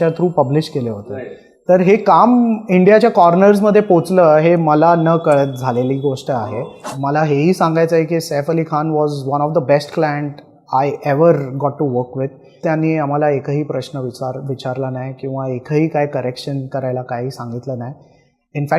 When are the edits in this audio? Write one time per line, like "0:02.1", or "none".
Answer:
0:06.8
0:12.6